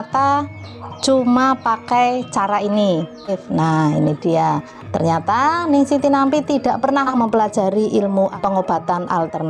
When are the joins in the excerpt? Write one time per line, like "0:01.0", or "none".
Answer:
0:03.4